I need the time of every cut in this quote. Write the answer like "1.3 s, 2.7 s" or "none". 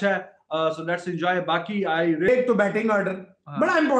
2.3 s